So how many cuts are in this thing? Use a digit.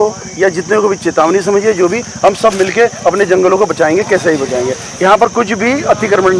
0